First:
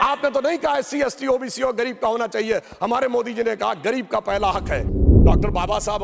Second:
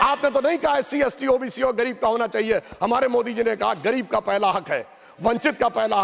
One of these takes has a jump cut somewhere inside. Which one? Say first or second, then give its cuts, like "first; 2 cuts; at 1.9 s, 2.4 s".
first; 1 cut; at 4.8 s